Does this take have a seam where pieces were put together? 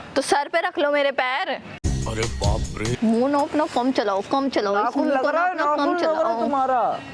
yes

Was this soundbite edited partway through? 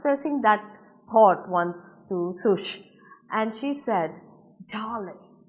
no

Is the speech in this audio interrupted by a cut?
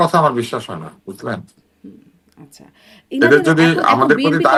no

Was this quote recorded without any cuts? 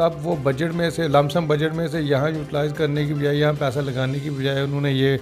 yes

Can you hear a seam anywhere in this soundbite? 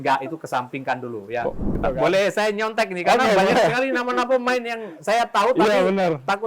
yes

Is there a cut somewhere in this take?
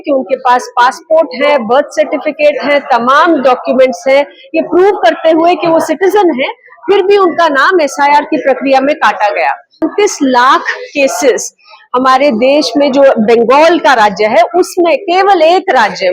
yes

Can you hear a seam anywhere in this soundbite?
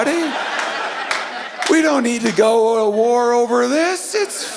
no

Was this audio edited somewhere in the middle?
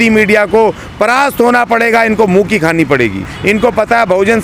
yes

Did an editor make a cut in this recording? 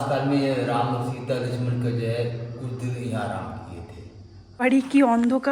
yes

